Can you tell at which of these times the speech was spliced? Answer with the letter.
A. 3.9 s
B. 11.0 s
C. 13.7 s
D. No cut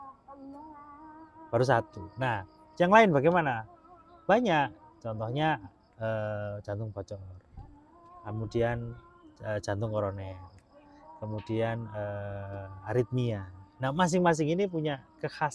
D